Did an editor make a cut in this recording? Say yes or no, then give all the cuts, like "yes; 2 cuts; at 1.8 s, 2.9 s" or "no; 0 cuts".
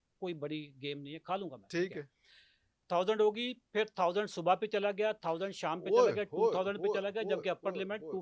yes; 1 cut; at 2.8 s